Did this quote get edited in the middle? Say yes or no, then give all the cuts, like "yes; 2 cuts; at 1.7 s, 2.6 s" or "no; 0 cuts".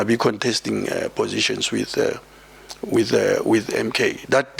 no; 0 cuts